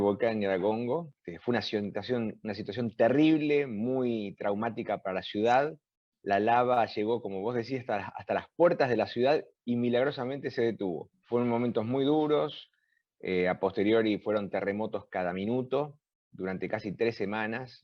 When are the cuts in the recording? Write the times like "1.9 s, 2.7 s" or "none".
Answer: 1.2 s, 11.1 s